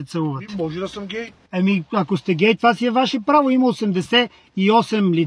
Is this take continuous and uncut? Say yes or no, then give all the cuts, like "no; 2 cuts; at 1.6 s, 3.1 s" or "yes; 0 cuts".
no; 1 cut; at 1.4 s